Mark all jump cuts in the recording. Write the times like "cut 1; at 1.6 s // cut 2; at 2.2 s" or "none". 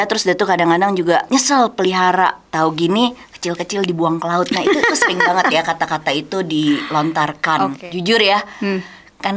cut 1; at 1.3 s // cut 2; at 2.4 s // cut 3; at 7.8 s